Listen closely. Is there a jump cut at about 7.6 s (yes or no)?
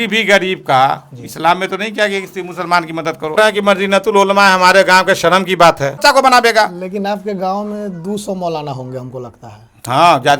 no